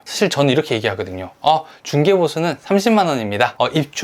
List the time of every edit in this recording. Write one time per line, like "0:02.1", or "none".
none